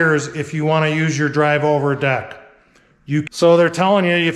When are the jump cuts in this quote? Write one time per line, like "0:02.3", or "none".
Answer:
0:03.3